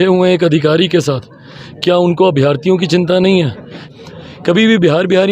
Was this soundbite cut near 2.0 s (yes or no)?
no